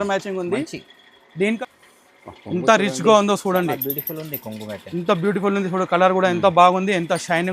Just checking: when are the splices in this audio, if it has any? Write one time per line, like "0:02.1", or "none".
0:01.6